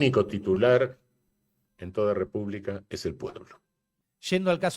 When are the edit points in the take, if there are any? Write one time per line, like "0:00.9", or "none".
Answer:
0:03.9